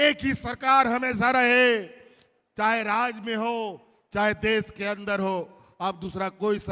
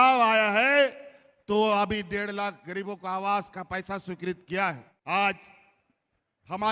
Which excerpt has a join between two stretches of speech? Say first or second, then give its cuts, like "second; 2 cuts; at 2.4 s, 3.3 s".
second; 1 cut; at 4.9 s